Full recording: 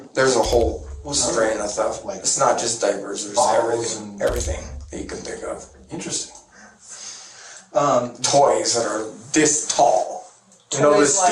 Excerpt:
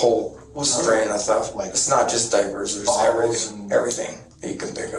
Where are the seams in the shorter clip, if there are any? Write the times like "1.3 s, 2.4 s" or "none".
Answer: none